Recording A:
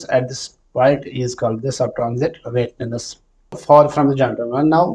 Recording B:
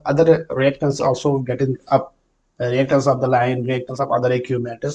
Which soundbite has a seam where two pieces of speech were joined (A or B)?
A